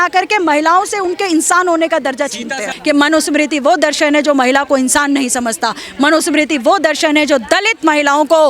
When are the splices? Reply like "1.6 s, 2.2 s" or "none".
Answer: 2.7 s